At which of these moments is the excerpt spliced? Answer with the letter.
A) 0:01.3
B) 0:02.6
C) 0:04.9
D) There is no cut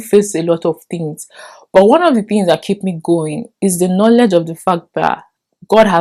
D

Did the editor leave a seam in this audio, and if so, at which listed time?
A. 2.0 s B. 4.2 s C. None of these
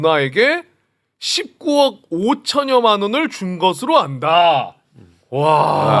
C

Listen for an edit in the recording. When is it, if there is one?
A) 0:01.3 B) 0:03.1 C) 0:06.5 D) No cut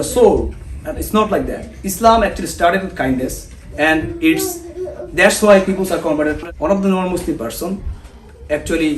C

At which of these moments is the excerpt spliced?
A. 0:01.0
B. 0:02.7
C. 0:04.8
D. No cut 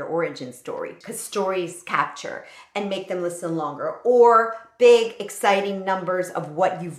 A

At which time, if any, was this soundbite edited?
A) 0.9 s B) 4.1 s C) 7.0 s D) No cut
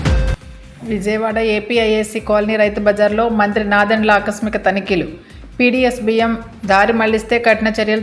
D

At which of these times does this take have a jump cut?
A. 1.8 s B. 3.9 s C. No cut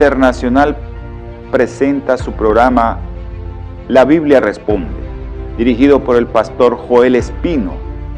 A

